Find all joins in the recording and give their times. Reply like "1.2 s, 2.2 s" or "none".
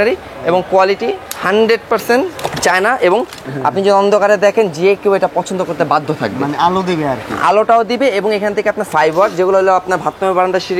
3.4 s, 8.9 s